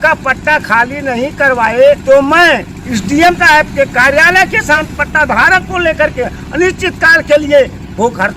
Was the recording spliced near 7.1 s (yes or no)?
no